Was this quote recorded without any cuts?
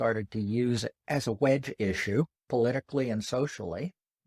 no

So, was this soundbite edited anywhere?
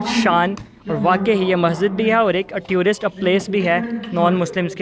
no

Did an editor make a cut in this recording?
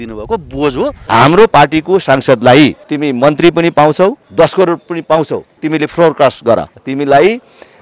yes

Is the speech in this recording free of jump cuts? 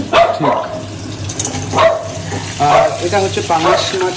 yes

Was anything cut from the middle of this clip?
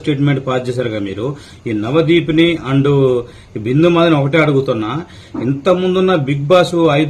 no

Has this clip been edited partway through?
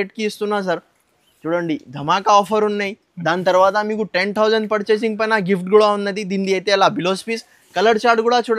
no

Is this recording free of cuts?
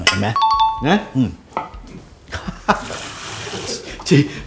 yes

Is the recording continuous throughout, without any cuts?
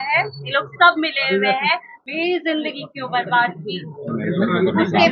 no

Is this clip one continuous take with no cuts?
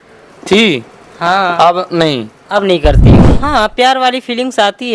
no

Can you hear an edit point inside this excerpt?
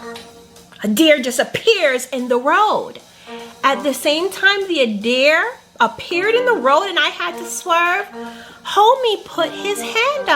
no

